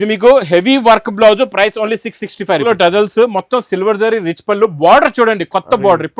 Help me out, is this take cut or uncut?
cut